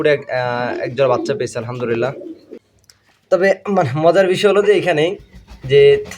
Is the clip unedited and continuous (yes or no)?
no